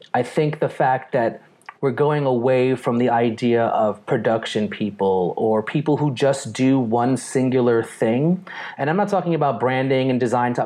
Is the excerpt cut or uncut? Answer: uncut